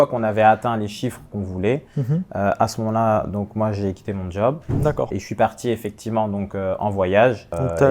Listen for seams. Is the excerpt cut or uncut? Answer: uncut